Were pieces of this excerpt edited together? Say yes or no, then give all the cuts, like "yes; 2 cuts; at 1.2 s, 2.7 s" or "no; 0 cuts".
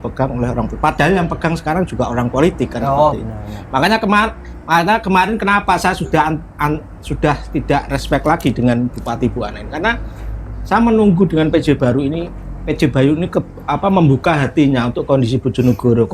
no; 0 cuts